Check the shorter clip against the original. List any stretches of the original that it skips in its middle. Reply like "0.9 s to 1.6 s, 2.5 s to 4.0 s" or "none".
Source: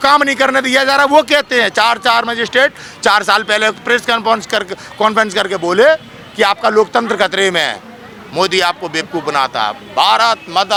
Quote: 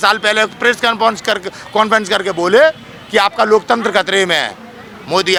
none